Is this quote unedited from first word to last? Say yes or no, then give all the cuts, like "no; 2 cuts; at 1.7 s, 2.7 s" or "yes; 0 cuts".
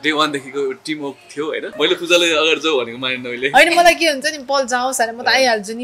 no; 1 cut; at 1.7 s